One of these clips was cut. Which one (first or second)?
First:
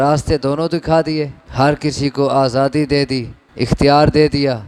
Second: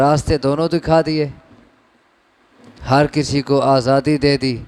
first